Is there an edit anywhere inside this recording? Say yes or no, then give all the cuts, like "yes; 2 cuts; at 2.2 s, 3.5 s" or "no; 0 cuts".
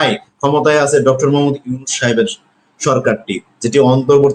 no; 0 cuts